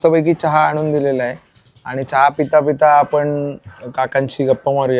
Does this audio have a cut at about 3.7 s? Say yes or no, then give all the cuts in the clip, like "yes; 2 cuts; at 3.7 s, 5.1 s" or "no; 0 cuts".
no; 0 cuts